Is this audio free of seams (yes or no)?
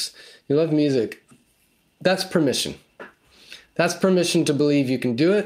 yes